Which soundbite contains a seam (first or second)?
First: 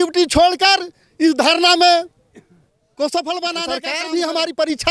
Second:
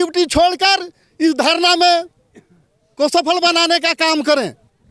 first